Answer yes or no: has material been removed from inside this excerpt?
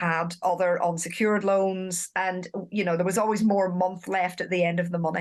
no